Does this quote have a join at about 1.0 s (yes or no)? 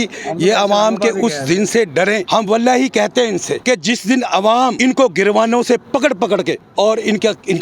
no